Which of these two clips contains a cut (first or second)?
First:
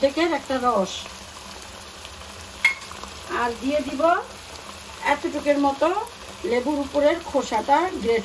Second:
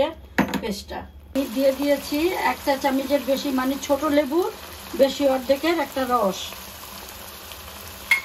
second